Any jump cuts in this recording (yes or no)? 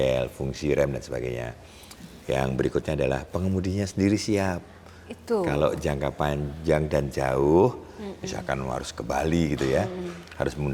no